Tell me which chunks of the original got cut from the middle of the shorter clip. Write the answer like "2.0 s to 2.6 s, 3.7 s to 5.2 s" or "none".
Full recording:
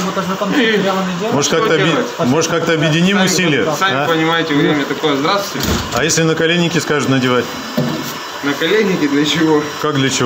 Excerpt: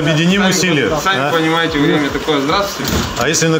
none